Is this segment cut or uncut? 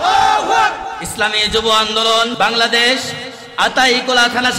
cut